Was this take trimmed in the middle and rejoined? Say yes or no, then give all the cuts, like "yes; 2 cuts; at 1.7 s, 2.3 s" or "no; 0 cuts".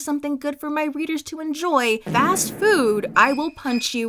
yes; 1 cut; at 2.1 s